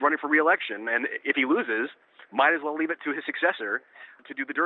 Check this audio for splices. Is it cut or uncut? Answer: uncut